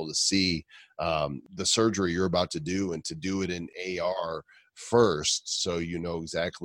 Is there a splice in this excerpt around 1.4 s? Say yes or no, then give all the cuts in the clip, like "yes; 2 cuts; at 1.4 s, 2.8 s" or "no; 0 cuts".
yes; 2 cuts; at 1.4 s, 3.6 s